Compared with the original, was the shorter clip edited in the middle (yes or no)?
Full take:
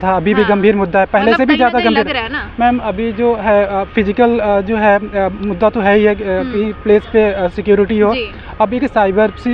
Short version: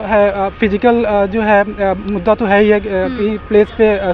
no